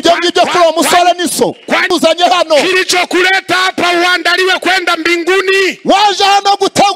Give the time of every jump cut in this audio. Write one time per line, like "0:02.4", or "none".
0:01.9

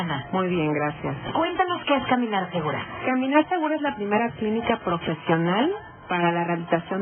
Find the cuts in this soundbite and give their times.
none

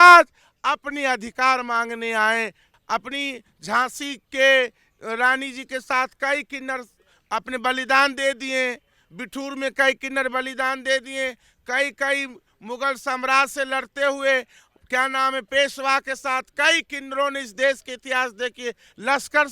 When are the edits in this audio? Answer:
0:02.7

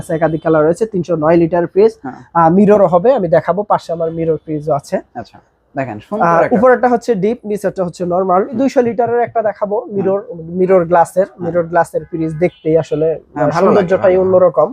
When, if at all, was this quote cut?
0:08.5

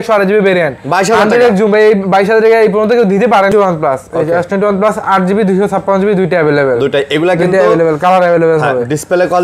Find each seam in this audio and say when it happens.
0:03.5

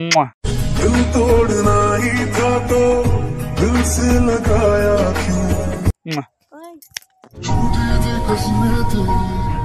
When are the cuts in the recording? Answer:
none

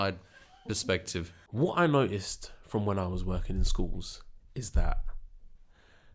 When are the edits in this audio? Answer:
0:01.4

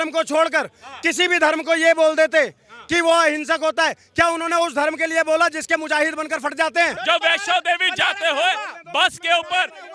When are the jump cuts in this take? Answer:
0:07.0

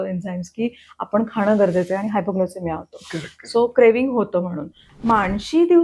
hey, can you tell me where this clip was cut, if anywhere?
0:04.9

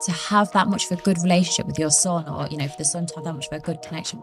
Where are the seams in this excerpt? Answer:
none

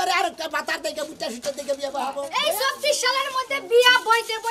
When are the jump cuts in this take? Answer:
0:02.2

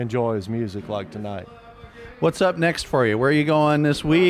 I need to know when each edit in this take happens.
none

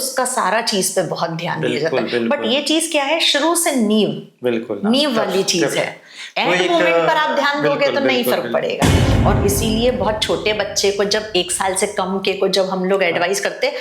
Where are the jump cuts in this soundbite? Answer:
0:09.0

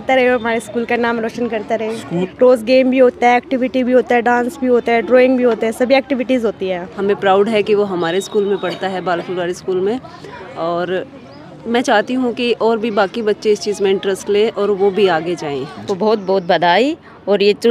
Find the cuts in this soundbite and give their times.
0:02.3
0:06.9
0:15.8

